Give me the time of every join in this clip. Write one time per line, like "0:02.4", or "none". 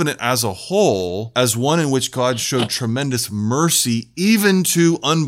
0:01.2